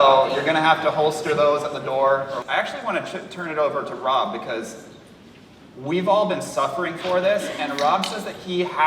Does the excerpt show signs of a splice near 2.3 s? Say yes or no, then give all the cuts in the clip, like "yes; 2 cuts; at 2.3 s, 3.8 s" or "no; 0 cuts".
yes; 1 cut; at 2.3 s